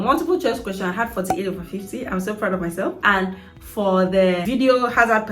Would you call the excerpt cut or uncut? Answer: cut